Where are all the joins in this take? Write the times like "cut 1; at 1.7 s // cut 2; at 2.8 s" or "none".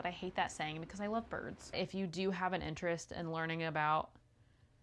cut 1; at 1.8 s